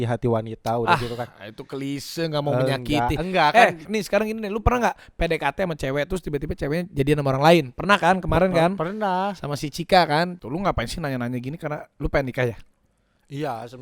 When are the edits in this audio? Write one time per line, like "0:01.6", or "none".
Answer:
0:03.8
0:10.4